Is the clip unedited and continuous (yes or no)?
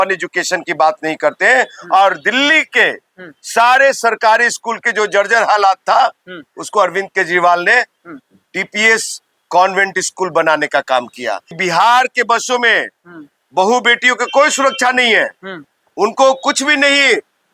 no